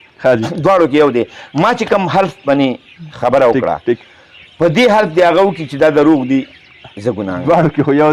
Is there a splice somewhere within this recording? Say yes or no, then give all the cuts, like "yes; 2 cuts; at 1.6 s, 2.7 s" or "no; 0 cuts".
no; 0 cuts